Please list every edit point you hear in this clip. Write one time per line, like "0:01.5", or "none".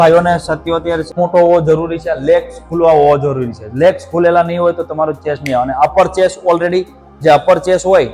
0:01.1